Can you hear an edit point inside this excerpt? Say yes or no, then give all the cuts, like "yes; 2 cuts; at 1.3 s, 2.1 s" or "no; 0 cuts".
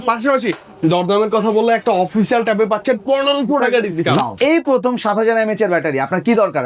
yes; 1 cut; at 4.3 s